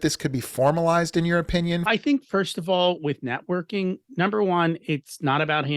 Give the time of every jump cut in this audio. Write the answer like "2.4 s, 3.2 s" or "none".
1.8 s